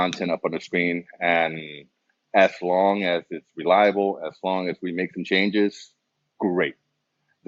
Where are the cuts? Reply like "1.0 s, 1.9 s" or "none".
none